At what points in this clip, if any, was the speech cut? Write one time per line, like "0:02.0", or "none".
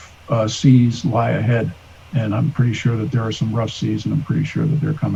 none